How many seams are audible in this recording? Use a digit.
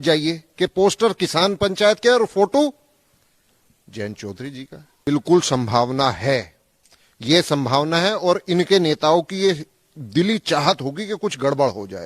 1